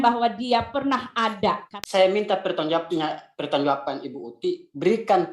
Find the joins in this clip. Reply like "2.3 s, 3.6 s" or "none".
1.7 s